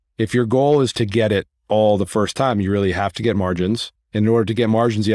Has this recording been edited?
yes; 2 cuts; at 0.9 s, 4.0 s

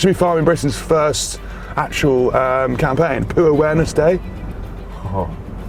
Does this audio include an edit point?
no; 0 cuts

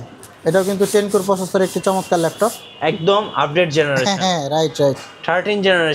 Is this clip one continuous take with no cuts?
yes; 0 cuts

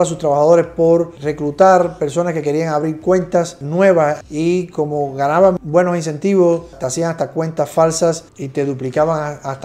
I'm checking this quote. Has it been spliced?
no; 0 cuts

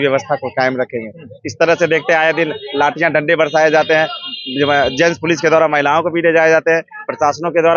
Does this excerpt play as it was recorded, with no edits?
yes; 0 cuts

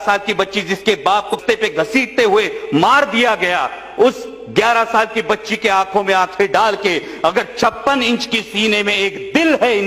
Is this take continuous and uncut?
no; 1 cut; at 1.3 s

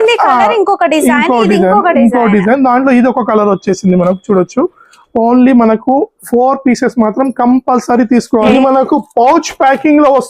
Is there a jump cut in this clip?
yes; 1 cut; at 8.5 s

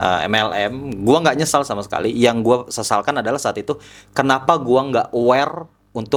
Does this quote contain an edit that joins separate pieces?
no; 0 cuts

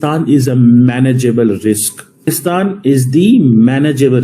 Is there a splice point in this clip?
yes; 1 cut; at 2.2 s

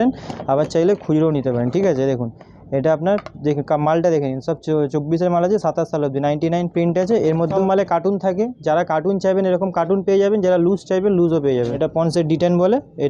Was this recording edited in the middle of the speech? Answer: yes; 2 cuts; at 7.5 s, 11.7 s

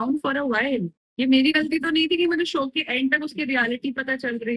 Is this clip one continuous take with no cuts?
yes; 0 cuts

